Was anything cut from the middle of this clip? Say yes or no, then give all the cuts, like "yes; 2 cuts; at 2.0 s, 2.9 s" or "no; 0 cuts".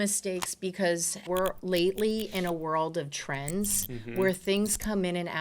yes; 1 cut; at 1.2 s